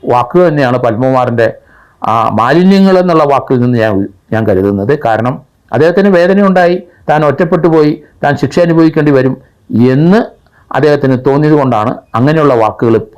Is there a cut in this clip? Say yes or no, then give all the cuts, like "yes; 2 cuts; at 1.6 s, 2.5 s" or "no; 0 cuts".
no; 0 cuts